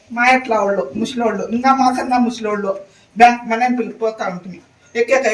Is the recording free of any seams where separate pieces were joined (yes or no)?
yes